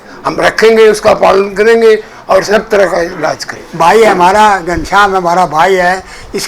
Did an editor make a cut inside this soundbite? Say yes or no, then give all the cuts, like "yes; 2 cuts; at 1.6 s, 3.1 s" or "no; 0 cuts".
yes; 1 cut; at 3.5 s